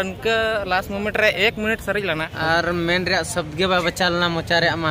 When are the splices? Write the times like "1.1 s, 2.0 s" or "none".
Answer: 2.3 s